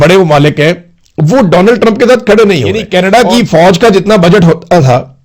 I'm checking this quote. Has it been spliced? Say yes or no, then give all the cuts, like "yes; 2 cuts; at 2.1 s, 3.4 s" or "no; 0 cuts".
yes; 1 cut; at 2.8 s